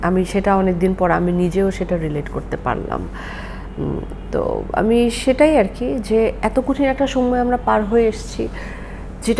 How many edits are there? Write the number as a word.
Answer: zero